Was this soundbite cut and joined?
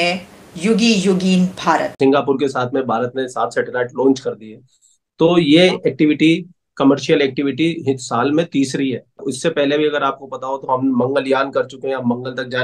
yes; 2 cuts; at 1.9 s, 9.1 s

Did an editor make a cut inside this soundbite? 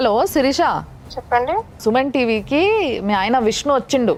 no; 0 cuts

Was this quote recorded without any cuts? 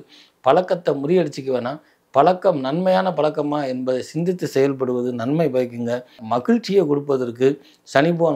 no; 1 cut; at 6.2 s

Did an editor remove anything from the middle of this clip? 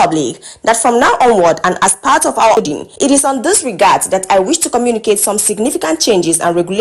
yes; 1 cut; at 2.6 s

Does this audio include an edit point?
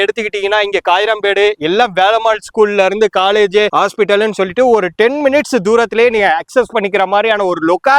no; 0 cuts

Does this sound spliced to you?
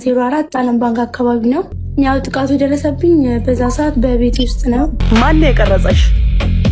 yes; 2 cuts; at 1.8 s, 5.0 s

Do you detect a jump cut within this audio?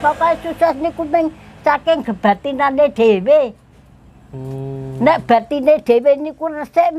no; 0 cuts

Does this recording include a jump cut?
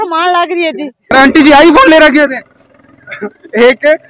yes; 1 cut; at 1.1 s

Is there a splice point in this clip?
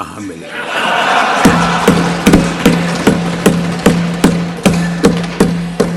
no; 0 cuts

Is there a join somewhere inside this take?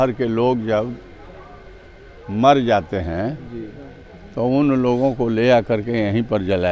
no; 0 cuts

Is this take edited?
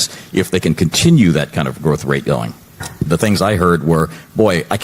yes; 1 cut; at 3.1 s

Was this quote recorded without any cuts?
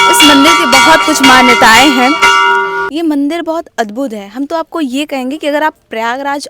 no; 1 cut; at 2.8 s

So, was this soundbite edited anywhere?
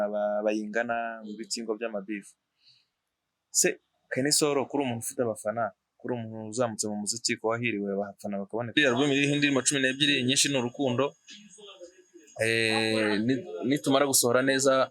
yes; 1 cut; at 8.7 s

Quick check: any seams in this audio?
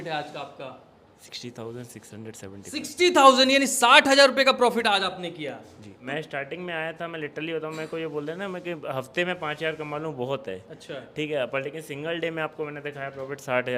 yes; 2 cuts; at 1.3 s, 6.1 s

